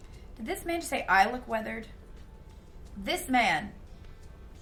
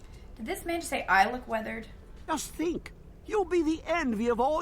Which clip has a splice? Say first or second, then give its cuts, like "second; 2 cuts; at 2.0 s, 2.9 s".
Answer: second; 1 cut; at 2.3 s